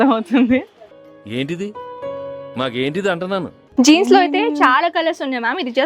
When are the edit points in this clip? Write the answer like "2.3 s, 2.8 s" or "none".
3.6 s